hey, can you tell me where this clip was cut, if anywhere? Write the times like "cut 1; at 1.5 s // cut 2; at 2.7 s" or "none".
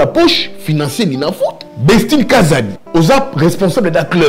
cut 1; at 1.7 s // cut 2; at 2.8 s